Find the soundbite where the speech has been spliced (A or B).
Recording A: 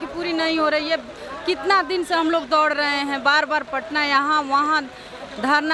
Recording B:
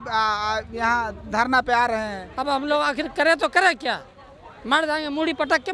B